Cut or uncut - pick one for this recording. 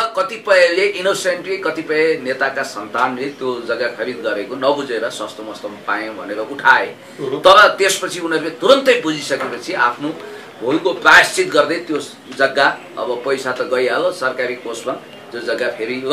uncut